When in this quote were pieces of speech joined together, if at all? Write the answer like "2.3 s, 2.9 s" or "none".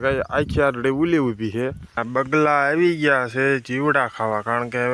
2.0 s